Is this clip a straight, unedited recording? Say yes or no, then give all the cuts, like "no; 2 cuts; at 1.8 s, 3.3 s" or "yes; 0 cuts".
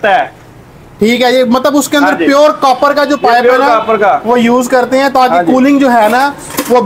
yes; 0 cuts